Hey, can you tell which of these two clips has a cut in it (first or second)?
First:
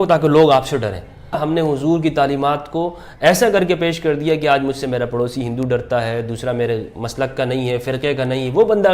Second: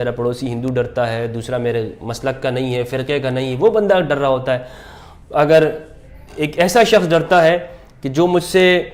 first